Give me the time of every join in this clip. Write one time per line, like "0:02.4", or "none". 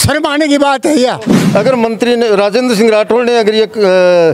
0:01.3